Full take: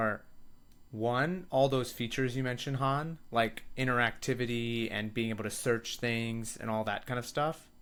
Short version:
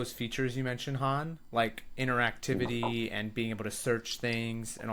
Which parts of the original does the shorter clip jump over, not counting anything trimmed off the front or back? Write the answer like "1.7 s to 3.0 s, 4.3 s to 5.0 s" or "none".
none